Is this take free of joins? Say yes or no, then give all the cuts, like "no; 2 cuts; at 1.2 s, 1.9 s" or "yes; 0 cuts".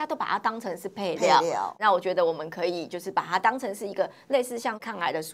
yes; 0 cuts